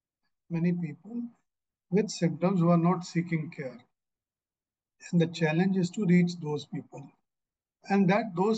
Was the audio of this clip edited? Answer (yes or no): no